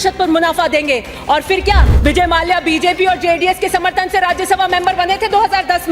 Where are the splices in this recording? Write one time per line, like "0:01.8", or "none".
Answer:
0:01.9

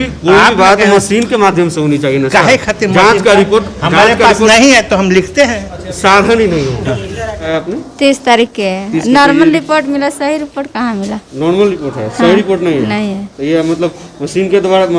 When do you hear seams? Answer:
0:07.5

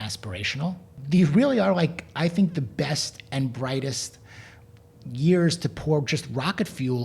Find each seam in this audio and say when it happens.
0:00.9

